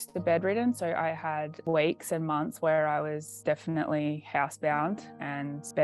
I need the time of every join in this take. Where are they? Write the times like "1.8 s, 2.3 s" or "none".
none